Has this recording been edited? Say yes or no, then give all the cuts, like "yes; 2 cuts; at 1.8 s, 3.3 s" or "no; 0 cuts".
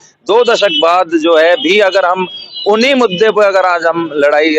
no; 0 cuts